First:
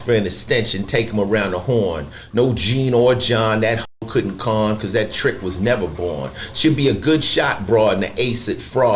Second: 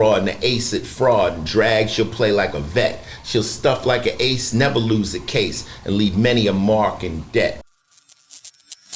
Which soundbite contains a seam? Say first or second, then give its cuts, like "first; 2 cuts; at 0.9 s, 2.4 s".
second; 1 cut; at 7.7 s